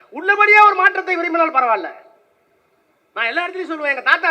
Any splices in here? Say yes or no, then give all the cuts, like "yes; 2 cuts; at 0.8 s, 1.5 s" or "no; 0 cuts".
no; 0 cuts